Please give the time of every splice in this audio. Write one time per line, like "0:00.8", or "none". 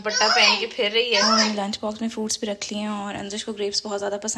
0:01.3